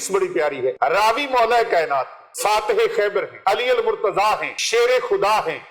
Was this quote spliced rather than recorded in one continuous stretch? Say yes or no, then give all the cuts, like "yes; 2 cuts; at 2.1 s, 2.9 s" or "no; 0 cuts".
yes; 4 cuts; at 0.8 s, 2.2 s, 3.3 s, 4.5 s